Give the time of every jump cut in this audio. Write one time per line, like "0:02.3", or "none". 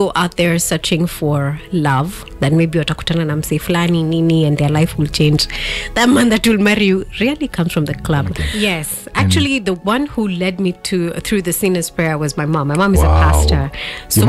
0:08.4